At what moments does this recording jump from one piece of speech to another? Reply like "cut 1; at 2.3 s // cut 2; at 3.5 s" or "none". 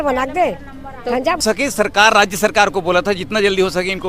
cut 1; at 1.4 s